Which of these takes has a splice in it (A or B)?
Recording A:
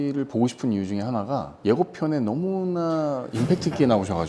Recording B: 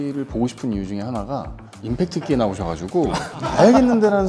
B